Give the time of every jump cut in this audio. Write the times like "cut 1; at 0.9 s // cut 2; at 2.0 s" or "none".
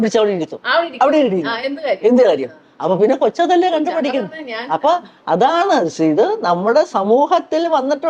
none